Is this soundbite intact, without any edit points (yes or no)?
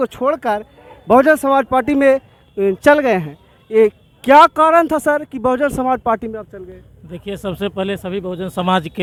yes